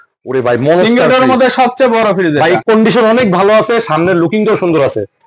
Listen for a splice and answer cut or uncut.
cut